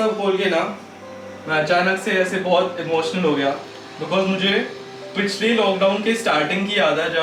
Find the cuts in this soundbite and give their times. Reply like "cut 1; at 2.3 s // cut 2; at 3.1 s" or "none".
none